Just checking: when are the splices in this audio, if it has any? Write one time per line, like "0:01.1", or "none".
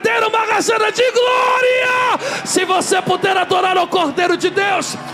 none